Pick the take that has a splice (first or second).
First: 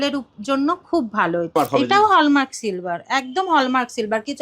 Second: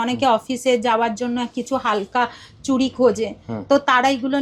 first